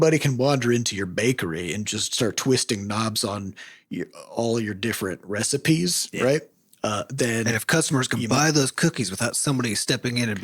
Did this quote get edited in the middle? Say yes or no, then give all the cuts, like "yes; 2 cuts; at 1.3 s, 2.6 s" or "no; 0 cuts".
no; 0 cuts